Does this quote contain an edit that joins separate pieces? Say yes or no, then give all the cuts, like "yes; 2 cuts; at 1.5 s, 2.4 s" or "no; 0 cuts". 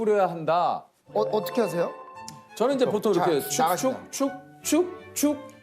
no; 0 cuts